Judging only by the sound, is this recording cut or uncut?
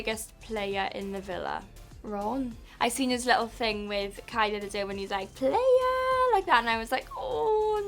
cut